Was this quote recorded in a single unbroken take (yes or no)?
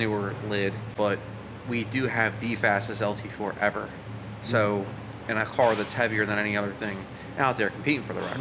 yes